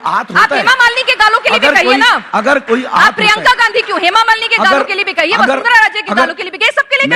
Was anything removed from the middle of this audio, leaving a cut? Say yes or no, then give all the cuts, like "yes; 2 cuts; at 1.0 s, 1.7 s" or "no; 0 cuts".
no; 0 cuts